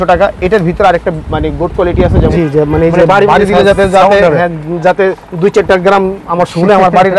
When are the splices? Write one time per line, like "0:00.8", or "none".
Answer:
0:02.3

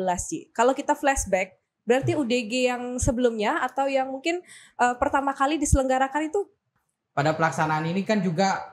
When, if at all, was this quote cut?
0:06.8

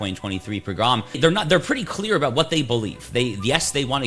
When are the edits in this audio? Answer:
0:01.2

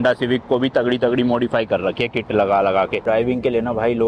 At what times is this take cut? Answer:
0:03.0

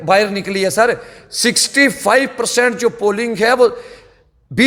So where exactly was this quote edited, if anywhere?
none

